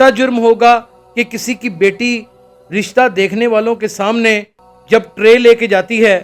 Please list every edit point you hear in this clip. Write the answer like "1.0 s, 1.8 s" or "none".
none